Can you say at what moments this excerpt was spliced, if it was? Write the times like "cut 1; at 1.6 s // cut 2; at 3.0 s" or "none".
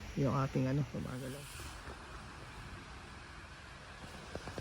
cut 1; at 1.3 s